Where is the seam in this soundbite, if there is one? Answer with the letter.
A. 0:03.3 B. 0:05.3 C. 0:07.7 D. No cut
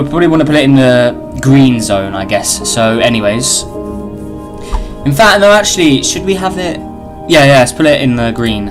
D